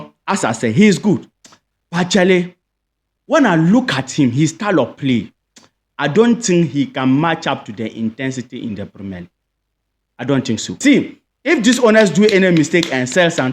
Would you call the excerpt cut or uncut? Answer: cut